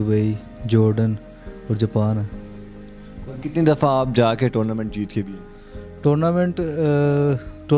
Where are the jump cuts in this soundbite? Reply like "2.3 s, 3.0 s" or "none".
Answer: none